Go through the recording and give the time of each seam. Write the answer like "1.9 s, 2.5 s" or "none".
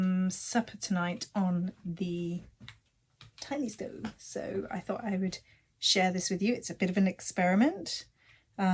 none